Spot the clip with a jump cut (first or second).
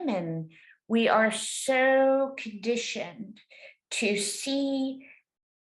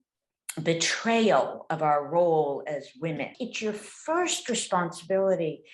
second